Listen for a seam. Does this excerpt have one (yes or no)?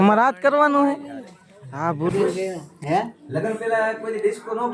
yes